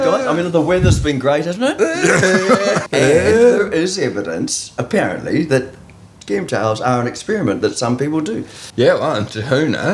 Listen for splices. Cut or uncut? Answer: cut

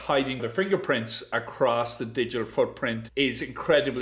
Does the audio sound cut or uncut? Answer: cut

